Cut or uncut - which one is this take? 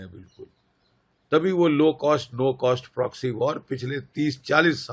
uncut